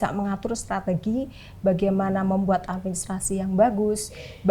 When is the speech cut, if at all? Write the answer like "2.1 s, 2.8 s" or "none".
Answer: none

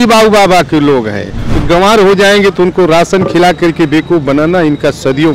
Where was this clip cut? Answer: 1.5 s

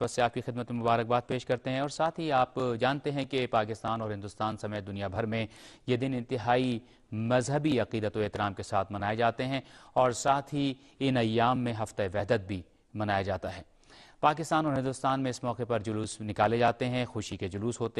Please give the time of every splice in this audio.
2.3 s

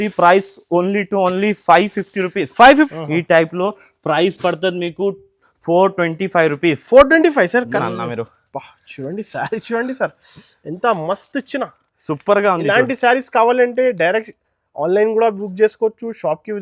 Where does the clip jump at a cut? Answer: 2.9 s, 7.7 s

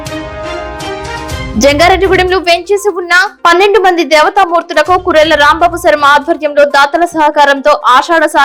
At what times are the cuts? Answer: none

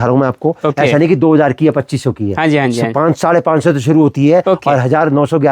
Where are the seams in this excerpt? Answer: none

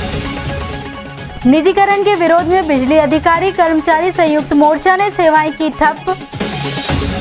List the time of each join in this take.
1.3 s

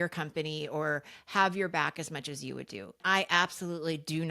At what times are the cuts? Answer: 3.0 s

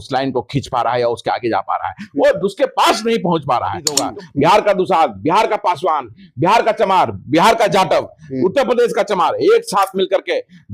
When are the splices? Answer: 4.0 s

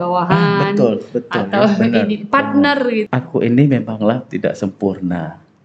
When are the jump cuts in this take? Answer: 3.1 s

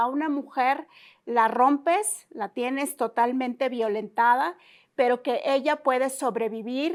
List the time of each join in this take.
none

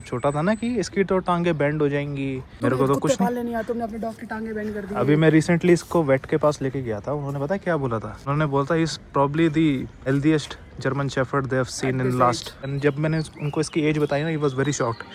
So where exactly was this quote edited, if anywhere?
2.5 s, 8.2 s, 9.9 s, 12.6 s

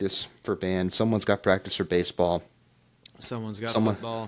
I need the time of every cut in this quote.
none

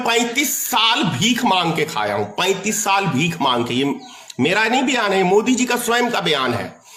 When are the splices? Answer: none

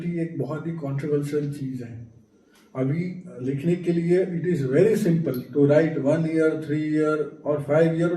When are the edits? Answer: none

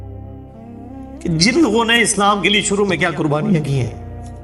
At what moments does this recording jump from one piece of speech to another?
1.2 s

